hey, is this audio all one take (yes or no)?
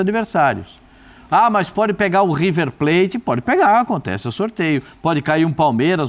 yes